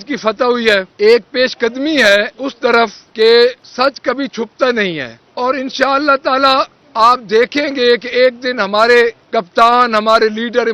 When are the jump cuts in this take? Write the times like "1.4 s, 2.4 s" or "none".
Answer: 0.9 s, 3.0 s, 3.6 s, 5.2 s, 6.8 s, 9.2 s

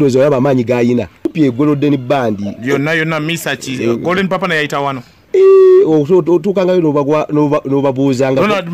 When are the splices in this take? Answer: 1.3 s

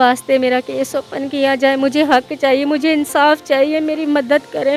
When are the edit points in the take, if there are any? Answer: none

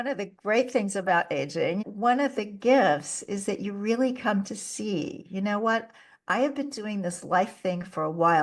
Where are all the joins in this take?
1.8 s

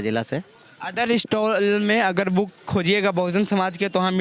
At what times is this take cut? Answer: none

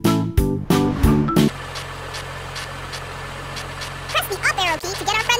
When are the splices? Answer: 1.6 s

